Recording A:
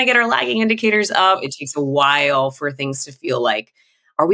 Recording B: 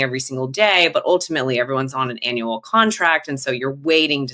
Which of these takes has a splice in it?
A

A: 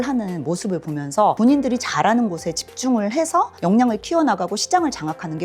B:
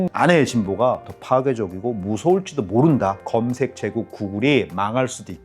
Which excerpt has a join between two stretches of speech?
B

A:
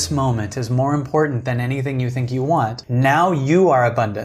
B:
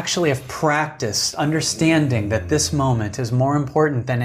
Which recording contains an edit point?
A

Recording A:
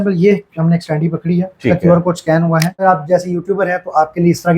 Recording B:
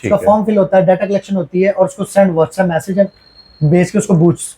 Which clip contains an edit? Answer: A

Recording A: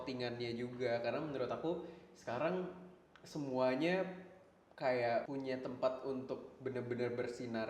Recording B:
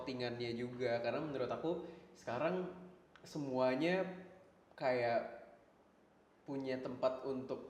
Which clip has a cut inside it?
A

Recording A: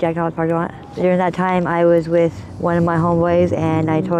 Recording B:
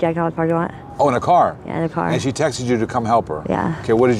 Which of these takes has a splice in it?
A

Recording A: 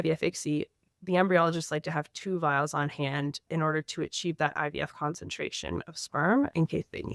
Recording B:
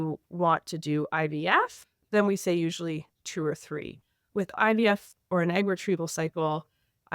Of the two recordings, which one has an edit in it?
B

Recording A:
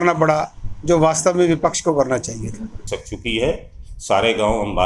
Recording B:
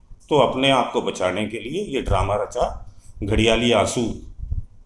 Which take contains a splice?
A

